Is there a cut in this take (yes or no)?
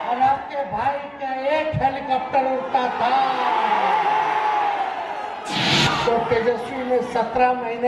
yes